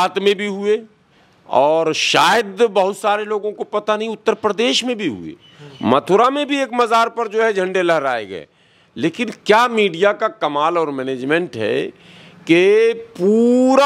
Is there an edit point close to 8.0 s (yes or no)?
no